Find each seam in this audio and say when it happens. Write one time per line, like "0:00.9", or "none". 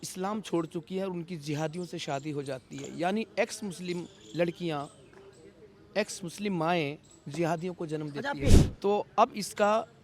0:08.6